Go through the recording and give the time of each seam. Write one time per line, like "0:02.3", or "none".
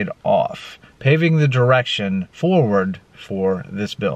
0:02.3